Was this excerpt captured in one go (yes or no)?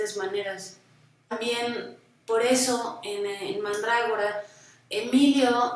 no